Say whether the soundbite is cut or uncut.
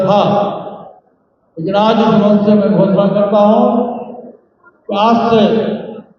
uncut